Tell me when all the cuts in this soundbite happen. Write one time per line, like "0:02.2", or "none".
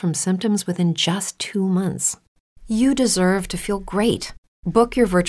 0:01.3